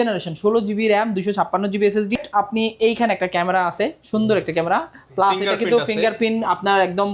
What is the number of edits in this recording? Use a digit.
1